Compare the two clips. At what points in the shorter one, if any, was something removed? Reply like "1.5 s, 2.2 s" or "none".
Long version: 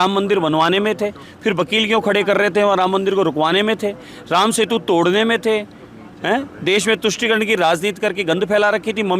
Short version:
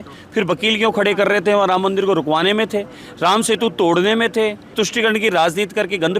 4.7 s